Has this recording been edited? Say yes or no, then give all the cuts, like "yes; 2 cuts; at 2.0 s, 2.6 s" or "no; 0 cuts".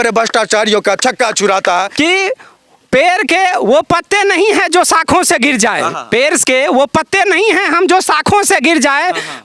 yes; 1 cut; at 1.9 s